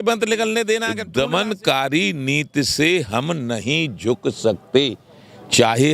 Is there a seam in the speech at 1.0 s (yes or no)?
yes